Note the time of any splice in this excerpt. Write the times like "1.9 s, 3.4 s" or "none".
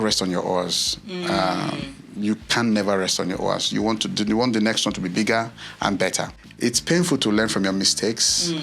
6.4 s